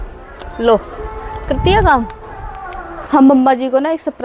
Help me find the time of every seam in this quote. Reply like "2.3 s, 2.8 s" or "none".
3.0 s